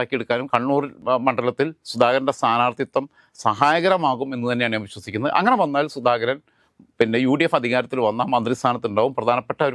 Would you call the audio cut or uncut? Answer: uncut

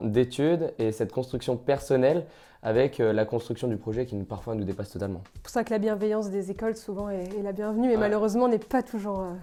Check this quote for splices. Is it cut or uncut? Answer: uncut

